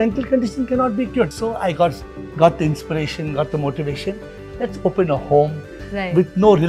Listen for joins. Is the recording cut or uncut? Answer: cut